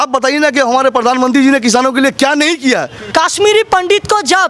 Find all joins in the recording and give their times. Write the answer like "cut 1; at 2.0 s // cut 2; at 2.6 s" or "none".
cut 1; at 3.0 s

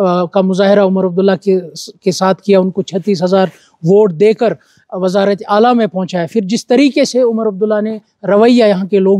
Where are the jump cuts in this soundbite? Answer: none

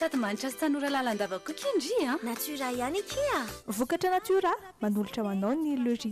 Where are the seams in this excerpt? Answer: none

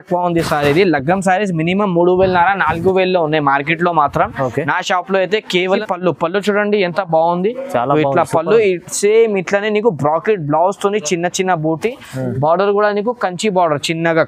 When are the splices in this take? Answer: cut 1; at 5.7 s

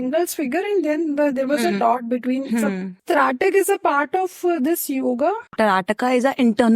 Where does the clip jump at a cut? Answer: cut 1; at 3.0 s // cut 2; at 5.5 s

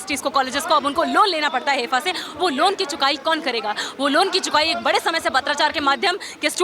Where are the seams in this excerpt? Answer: none

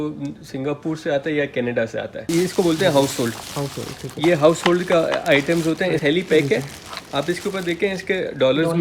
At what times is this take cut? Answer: cut 1; at 2.2 s // cut 2; at 6.0 s

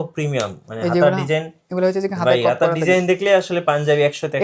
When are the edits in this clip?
none

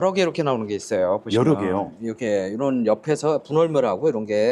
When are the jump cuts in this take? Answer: none

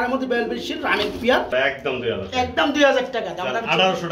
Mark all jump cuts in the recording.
cut 1; at 1.5 s

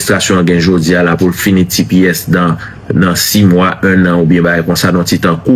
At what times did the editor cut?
none

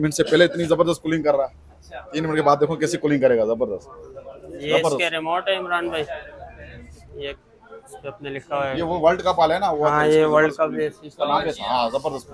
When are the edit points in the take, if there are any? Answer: none

